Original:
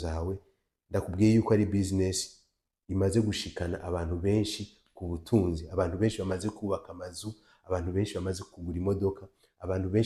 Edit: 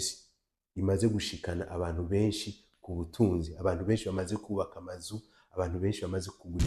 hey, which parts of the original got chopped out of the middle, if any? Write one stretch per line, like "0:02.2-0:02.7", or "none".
none